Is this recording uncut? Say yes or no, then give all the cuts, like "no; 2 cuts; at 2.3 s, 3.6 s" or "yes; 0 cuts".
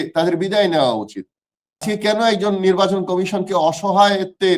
no; 1 cut; at 1.8 s